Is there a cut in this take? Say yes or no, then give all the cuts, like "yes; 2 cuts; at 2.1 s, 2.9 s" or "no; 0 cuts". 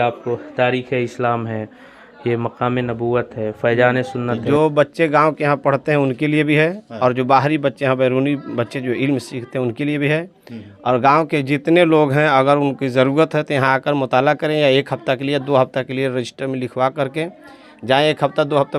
yes; 1 cut; at 4.4 s